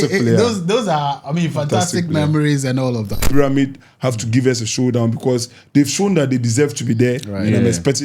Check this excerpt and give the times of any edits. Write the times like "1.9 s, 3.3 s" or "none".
3.3 s